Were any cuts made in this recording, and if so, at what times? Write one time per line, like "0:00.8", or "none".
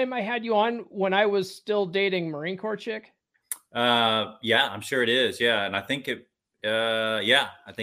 none